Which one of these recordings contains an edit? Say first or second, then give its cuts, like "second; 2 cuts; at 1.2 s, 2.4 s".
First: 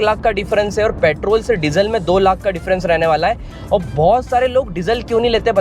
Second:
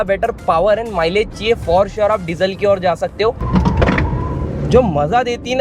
second; 1 cut; at 3.4 s